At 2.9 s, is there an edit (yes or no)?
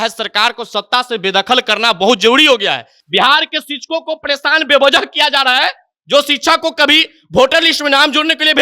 yes